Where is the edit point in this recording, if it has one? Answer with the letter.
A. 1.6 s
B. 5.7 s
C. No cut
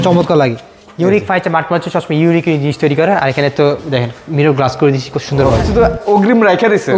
B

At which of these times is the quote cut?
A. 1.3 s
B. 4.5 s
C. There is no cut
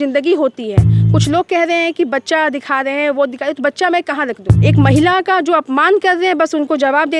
B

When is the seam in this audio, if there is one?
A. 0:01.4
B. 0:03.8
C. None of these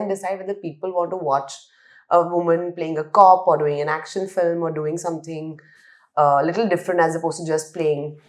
C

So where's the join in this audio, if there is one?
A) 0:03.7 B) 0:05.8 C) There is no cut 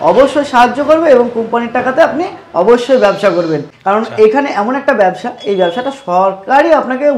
A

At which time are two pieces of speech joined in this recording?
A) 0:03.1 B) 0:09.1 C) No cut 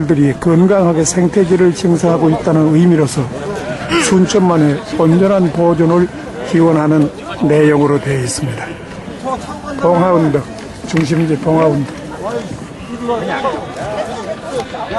B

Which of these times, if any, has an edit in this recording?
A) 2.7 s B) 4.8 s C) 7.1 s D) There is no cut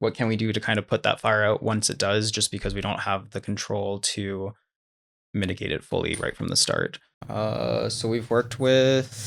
C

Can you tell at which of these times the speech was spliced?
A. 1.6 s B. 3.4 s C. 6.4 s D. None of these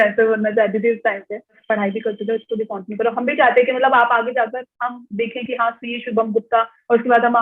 A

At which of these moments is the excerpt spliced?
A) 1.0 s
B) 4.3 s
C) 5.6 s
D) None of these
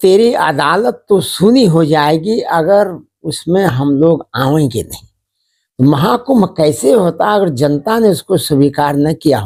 D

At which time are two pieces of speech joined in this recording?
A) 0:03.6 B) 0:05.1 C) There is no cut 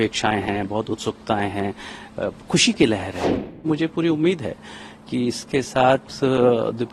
A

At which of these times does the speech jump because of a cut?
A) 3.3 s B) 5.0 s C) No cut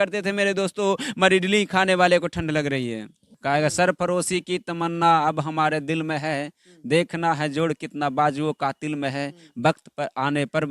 A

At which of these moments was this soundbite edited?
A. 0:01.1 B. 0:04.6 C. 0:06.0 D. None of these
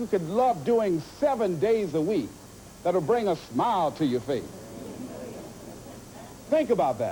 D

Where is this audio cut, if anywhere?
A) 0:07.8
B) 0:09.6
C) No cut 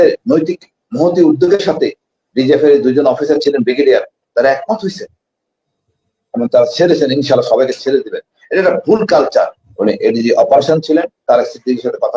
B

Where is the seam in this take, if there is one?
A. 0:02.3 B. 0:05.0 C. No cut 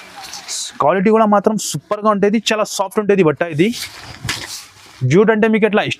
C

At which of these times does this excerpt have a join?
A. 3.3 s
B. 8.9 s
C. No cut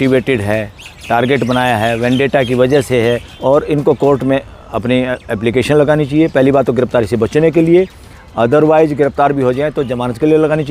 A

